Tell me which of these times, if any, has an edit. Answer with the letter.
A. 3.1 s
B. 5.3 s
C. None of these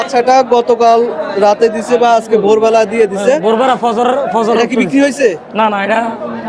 C